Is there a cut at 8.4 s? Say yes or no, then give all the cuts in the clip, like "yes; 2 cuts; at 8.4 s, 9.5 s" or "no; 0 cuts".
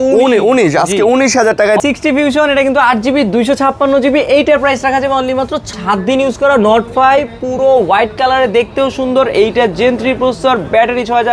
no; 2 cuts; at 1.8 s, 5.7 s